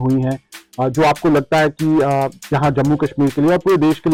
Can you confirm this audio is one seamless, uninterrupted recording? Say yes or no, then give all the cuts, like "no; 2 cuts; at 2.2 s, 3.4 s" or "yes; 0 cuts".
yes; 0 cuts